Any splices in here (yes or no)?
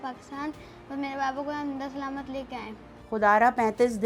yes